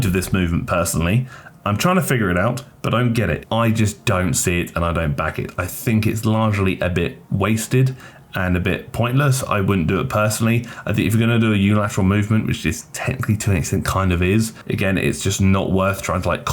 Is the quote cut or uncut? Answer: cut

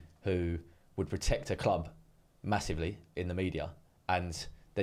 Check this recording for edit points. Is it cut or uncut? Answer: uncut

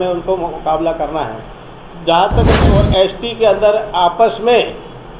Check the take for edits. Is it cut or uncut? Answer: cut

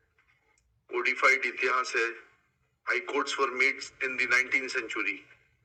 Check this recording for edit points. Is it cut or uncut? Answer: uncut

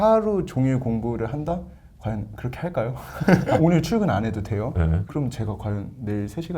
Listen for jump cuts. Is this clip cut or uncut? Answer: cut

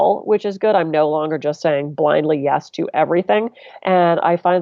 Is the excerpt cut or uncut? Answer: cut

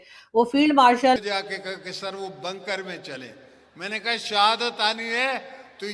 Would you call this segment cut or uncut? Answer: cut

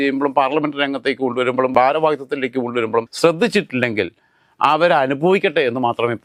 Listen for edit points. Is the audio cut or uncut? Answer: uncut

